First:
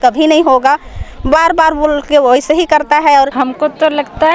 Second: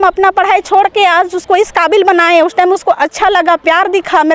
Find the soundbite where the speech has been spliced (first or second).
first